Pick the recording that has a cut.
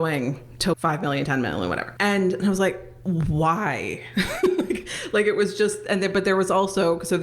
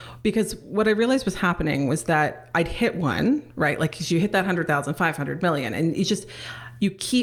first; 3 cuts; at 0.8 s, 1.9 s, 2.9 s

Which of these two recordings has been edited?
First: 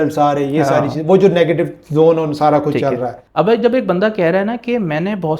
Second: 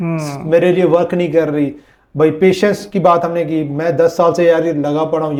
first; 1 cut; at 3.2 s

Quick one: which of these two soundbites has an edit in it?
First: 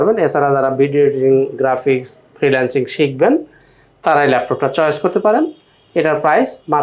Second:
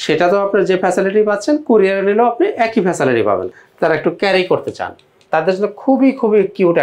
second; 1 cut; at 3.5 s

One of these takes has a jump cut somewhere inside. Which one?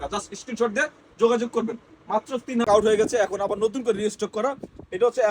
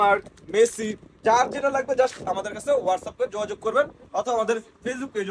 first; 1 cut; at 2.7 s

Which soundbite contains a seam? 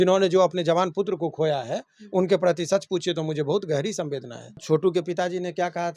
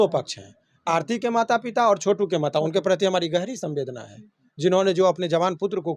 first; 1 cut; at 4.6 s

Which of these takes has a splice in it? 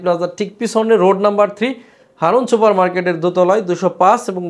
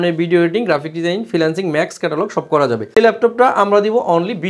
second; 1 cut; at 2.9 s

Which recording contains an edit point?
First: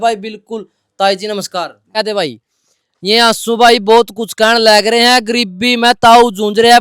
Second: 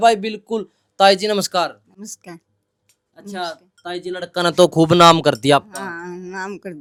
first; 1 cut; at 2.0 s

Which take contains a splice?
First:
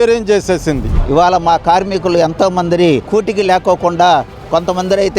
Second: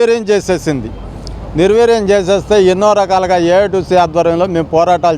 first; 2 cuts; at 1.0 s, 3.0 s

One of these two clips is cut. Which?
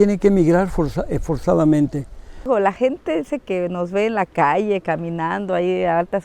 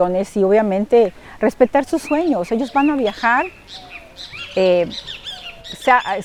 first; 1 cut; at 2.5 s

